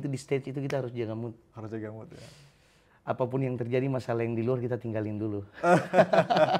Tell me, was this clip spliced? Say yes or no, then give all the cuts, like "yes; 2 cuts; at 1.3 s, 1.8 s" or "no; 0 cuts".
no; 0 cuts